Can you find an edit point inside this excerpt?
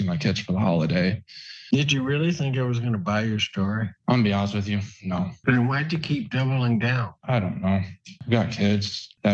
yes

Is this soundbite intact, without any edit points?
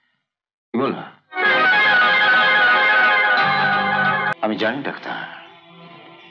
no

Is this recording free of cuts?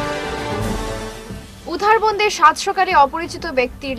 yes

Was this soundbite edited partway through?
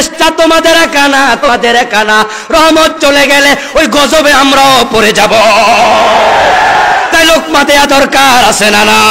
yes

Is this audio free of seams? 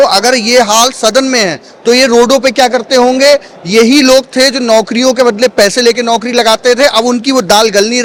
yes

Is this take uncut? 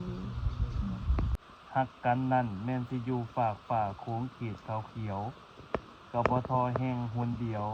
no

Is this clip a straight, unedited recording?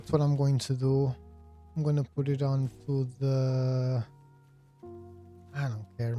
yes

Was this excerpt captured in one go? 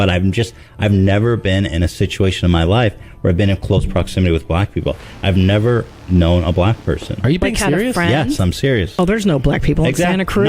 no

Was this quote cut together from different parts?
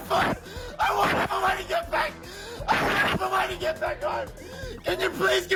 no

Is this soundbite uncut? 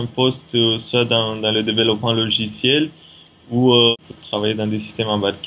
no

